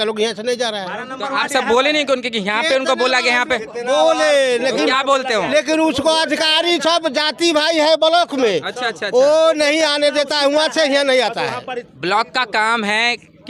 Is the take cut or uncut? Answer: uncut